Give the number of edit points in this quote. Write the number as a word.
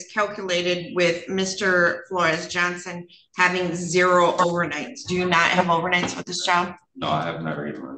zero